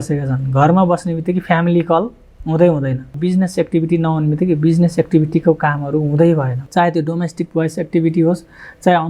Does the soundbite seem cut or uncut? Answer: cut